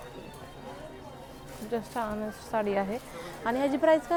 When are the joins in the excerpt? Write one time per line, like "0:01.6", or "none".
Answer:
none